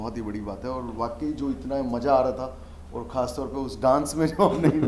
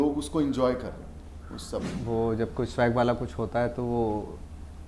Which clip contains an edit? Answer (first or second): second